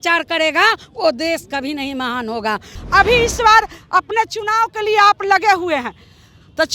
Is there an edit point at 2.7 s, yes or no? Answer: yes